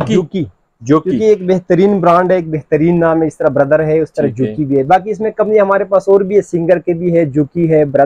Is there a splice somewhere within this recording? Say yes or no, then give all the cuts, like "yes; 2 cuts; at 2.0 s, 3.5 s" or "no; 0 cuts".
no; 0 cuts